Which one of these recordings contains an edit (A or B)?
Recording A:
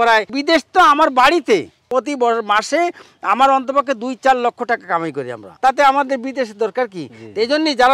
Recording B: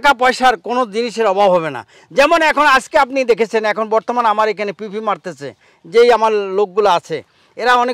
A